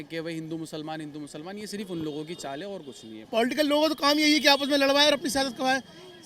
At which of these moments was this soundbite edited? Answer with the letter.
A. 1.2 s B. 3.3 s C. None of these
B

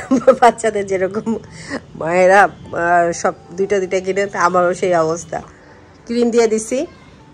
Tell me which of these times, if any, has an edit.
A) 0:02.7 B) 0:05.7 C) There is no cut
B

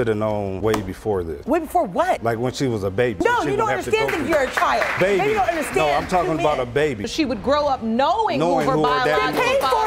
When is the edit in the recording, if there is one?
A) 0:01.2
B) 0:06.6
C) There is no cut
C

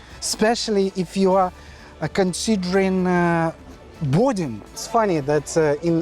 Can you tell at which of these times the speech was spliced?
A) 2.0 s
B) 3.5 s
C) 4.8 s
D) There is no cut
C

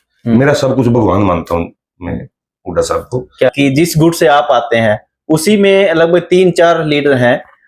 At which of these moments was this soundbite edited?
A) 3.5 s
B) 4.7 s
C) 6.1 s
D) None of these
A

